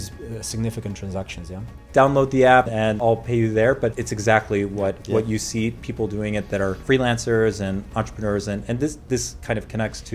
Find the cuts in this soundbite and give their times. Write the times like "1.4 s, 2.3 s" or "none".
1.8 s, 3.0 s, 4.1 s, 6.8 s

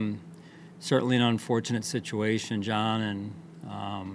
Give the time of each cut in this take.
none

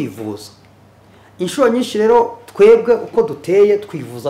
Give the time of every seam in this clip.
none

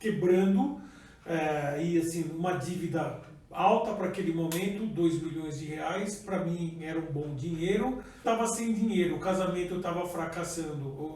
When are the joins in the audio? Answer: 8.2 s

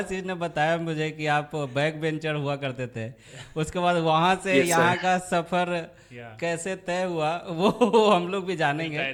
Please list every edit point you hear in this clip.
none

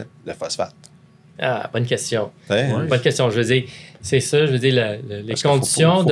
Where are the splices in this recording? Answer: none

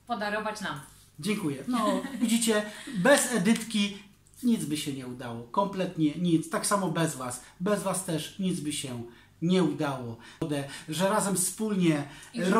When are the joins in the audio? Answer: 10.4 s

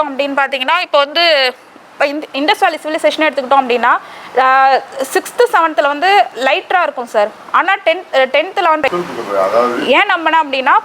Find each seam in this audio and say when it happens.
8.9 s

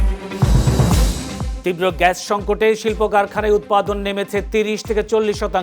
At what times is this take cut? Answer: 1.5 s

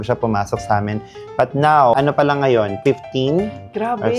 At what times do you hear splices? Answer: 1.9 s

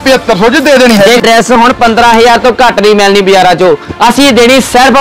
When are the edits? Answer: 1.3 s

